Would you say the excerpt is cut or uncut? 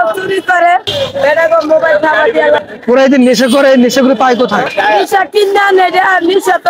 cut